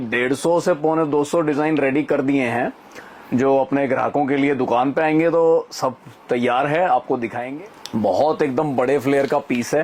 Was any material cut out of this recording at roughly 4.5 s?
no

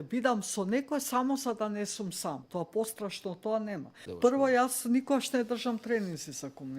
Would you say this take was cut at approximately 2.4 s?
yes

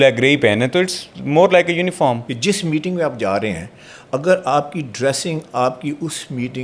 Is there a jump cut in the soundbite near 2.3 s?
yes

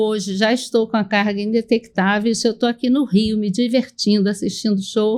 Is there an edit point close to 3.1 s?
no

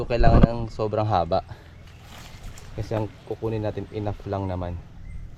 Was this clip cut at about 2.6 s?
no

